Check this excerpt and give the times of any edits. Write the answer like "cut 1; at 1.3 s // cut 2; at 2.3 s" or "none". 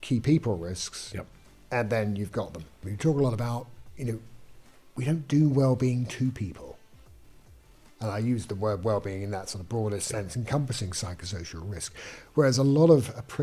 cut 1; at 2.7 s